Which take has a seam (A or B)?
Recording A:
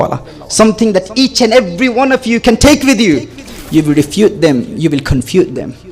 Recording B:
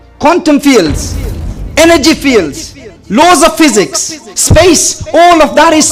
A